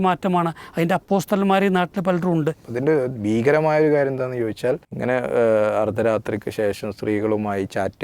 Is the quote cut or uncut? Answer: cut